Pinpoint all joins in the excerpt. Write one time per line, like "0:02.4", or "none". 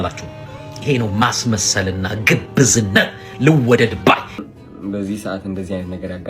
0:04.4

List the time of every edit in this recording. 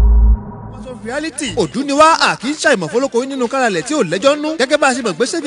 0:01.0

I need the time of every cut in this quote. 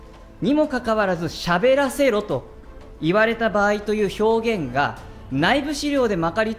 none

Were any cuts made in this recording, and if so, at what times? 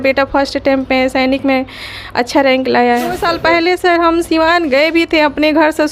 0:03.2

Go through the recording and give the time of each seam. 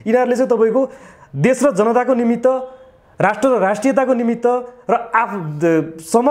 none

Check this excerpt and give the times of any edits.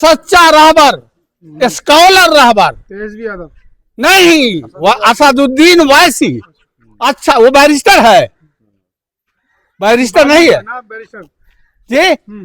none

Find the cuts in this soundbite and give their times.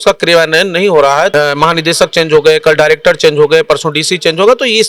0:01.3

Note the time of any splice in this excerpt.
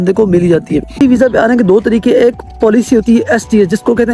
0:01.0

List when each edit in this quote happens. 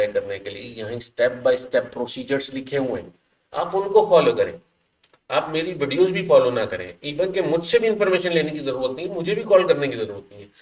none

